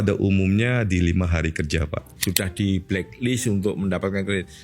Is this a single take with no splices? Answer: no; 1 cut; at 2.1 s

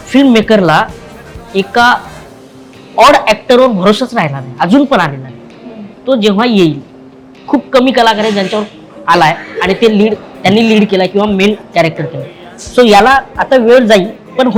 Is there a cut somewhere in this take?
no; 0 cuts

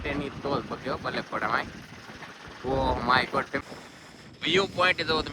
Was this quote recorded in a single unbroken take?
no; 1 cut; at 3.6 s

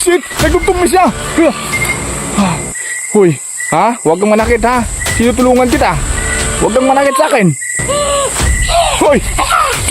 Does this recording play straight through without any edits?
yes; 0 cuts

